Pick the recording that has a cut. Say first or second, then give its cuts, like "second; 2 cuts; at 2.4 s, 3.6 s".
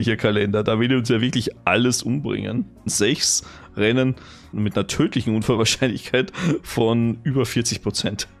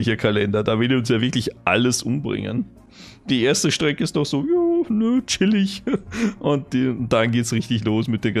first; 2 cuts; at 2.9 s, 4.5 s